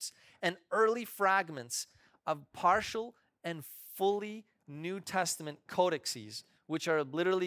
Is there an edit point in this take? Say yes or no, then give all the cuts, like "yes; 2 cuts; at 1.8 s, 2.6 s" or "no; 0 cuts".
no; 0 cuts